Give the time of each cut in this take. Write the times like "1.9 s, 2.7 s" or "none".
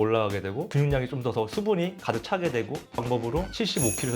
3.0 s